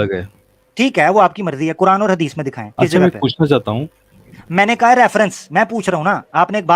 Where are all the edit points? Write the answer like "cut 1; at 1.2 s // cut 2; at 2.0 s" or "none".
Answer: none